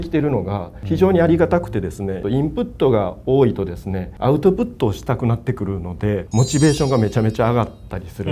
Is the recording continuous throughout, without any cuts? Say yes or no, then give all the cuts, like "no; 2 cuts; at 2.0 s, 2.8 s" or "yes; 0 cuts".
no; 1 cut; at 6.2 s